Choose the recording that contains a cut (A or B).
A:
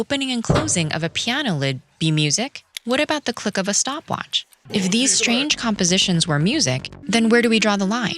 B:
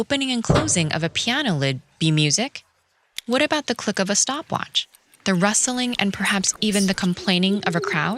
A